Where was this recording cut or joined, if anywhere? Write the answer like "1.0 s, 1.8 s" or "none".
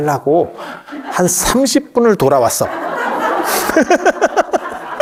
none